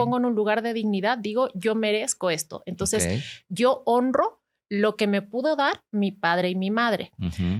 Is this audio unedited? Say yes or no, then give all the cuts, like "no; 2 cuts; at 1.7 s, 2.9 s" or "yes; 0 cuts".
yes; 0 cuts